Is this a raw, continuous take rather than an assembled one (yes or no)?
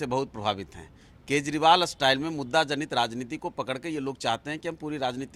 yes